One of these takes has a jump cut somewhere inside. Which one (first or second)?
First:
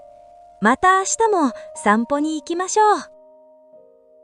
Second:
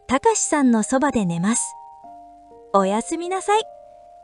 first